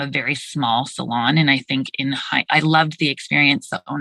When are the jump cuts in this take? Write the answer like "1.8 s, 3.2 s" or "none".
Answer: none